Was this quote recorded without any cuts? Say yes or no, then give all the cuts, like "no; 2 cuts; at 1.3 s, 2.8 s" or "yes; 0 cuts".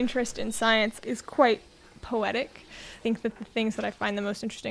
no; 2 cuts; at 1.0 s, 3.0 s